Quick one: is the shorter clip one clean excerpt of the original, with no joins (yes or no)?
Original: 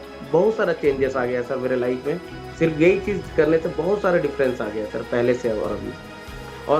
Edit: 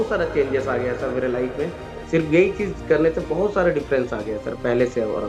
yes